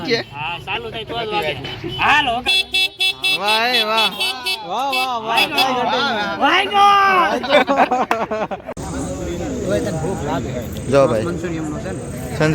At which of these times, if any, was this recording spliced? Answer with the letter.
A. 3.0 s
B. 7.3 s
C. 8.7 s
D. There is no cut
C